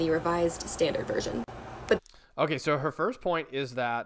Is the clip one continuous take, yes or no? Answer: yes